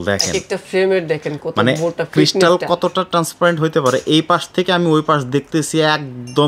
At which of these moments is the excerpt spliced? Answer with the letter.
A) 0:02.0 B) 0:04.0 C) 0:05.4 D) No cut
D